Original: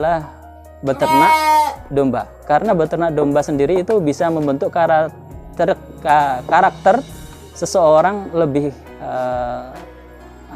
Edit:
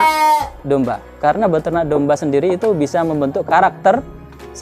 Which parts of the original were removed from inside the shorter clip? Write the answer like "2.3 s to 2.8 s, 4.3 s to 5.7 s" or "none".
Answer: 4.7 s to 6.4 s

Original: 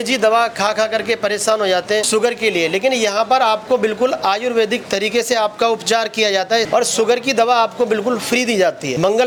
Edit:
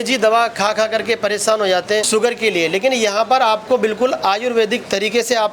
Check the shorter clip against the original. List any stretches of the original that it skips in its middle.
none

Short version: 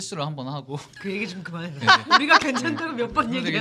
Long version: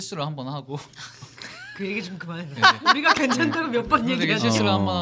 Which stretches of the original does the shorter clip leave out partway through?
0.9 s to 1.7 s

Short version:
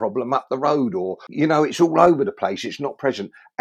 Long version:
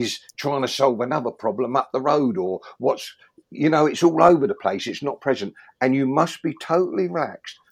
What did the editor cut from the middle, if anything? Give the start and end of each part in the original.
2.6 s to 3.4 s

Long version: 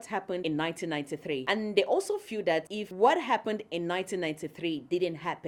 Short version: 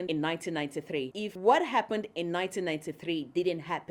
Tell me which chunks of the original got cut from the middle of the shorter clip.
1.5 s to 2.7 s

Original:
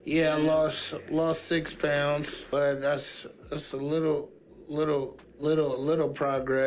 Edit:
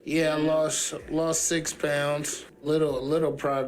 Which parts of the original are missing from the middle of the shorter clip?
2.4 s to 5.2 s

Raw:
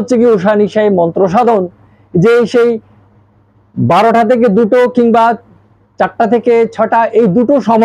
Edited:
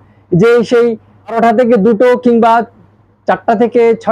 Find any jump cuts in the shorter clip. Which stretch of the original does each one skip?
3.2 s to 4.1 s

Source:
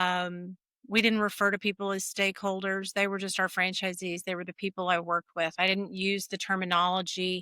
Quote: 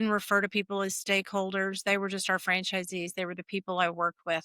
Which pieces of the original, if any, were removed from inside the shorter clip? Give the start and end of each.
none

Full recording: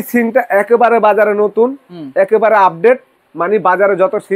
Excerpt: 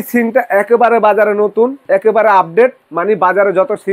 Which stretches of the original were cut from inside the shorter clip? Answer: 1.8 s to 2.1 s, 3.1 s to 3.3 s

